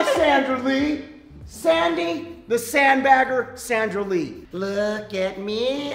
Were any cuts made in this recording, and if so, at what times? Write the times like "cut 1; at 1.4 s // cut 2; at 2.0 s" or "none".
cut 1; at 4.4 s